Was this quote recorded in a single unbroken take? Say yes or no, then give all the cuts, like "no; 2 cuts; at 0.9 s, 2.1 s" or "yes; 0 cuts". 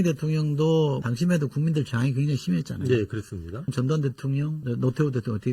no; 3 cuts; at 1.0 s, 3.7 s, 4.6 s